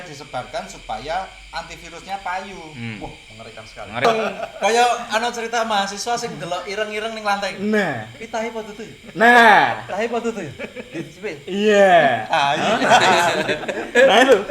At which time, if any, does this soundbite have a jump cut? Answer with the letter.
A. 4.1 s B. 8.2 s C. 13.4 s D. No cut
A